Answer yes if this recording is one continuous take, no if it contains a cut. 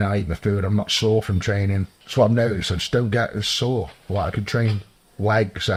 yes